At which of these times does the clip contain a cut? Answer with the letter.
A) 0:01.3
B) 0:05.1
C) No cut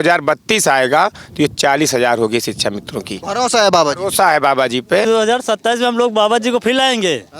B